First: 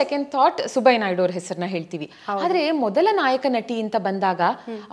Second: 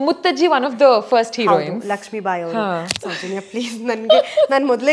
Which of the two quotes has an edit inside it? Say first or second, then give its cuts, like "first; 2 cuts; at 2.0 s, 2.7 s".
second; 1 cut; at 2.9 s